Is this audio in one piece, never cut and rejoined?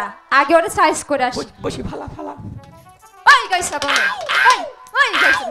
yes; 0 cuts

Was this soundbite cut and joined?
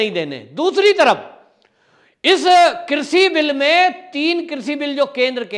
no; 0 cuts

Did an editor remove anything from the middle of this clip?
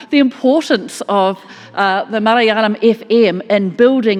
no; 0 cuts

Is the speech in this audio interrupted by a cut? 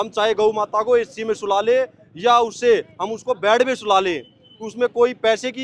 no; 0 cuts

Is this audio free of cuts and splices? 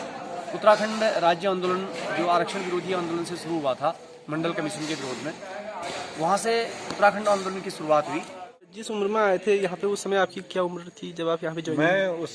no; 1 cut; at 8.9 s

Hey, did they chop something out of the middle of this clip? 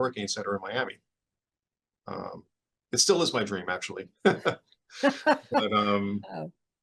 no; 0 cuts

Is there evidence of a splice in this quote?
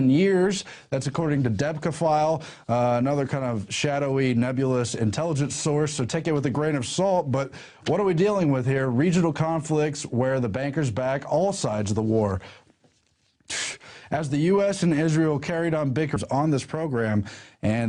no; 0 cuts

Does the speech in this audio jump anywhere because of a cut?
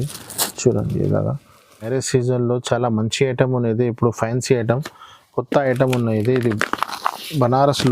yes; 1 cut; at 1.9 s

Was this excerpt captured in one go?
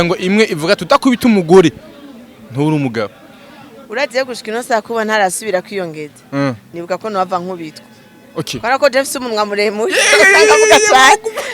yes; 0 cuts

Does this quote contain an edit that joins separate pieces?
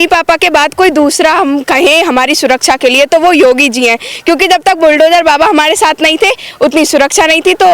no; 0 cuts

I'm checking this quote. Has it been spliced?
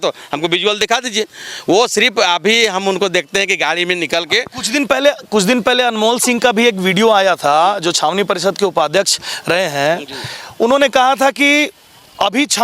no; 0 cuts

